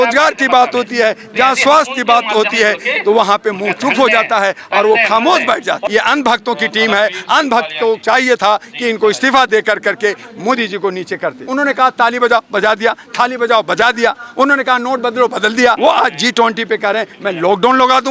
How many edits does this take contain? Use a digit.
3